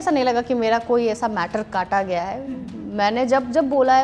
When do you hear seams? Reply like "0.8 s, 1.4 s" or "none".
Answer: none